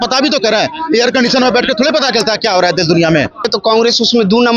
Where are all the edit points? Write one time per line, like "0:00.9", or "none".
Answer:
0:03.5